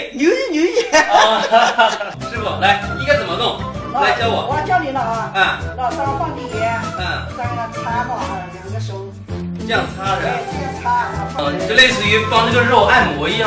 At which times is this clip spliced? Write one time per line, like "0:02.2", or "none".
0:09.7